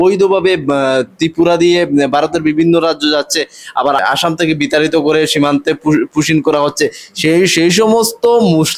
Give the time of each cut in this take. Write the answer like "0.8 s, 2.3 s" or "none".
4.0 s